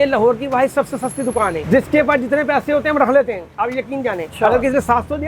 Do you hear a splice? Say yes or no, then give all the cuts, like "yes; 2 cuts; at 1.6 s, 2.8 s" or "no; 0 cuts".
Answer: yes; 2 cuts; at 1.6 s, 4.3 s